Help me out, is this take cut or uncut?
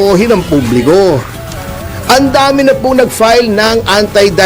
uncut